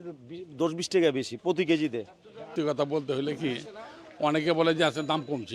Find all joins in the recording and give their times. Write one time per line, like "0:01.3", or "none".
0:02.5